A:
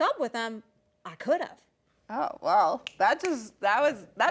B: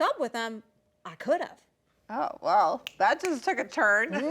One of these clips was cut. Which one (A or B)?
B